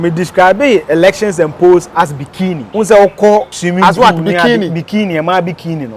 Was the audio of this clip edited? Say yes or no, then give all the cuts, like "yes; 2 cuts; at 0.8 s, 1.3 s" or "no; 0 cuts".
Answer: yes; 2 cuts; at 2.6 s, 3.6 s